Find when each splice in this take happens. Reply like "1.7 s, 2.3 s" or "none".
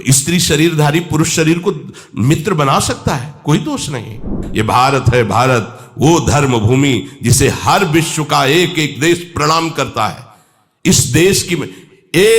4.4 s